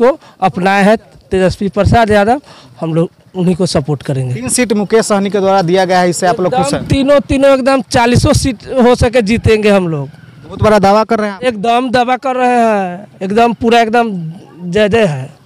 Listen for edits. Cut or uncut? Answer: uncut